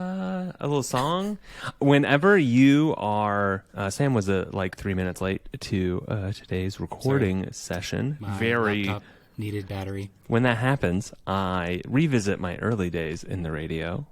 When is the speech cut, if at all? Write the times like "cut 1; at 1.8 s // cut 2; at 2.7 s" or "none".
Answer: cut 1; at 10.1 s